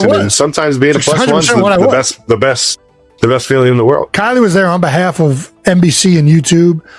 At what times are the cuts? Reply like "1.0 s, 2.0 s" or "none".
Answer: none